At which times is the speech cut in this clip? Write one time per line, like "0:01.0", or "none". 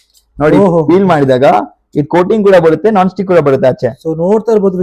none